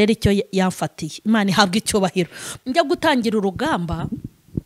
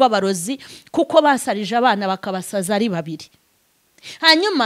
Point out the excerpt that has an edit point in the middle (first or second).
first